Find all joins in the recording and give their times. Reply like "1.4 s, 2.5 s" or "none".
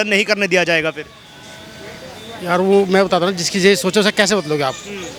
none

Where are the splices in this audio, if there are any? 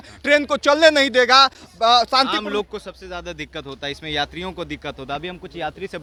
none

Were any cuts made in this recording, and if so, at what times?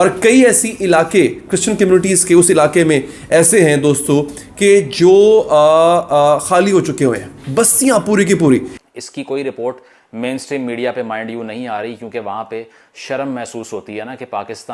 8.8 s

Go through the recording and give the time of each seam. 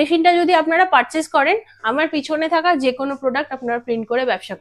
none

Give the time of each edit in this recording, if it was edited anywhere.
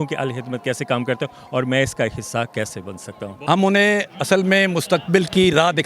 3.2 s

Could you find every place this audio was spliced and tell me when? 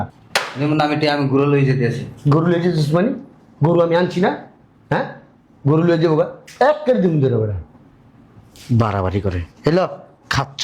none

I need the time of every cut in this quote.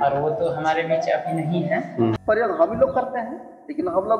2.2 s

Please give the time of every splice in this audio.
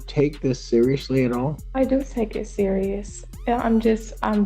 1.6 s

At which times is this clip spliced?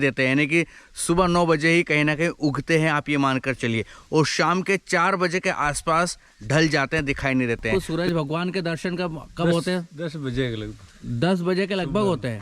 7.6 s

